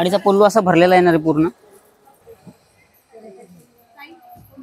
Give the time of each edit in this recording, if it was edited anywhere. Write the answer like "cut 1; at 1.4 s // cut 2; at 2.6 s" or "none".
cut 1; at 2.2 s